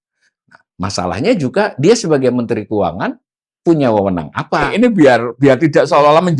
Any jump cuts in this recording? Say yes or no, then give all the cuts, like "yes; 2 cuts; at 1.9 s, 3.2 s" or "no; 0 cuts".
yes; 1 cut; at 4.7 s